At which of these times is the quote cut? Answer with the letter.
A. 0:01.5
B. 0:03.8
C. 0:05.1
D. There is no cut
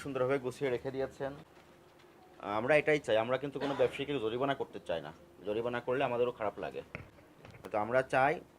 A